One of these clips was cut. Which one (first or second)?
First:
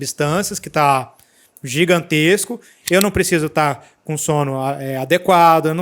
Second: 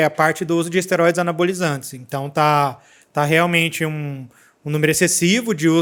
first